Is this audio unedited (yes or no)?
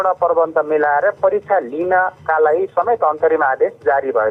yes